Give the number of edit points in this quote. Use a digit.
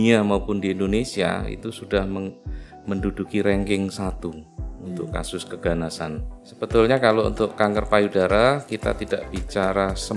1